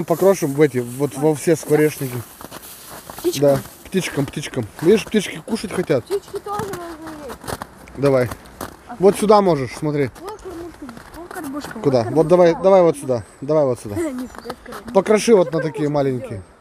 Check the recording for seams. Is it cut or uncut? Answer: uncut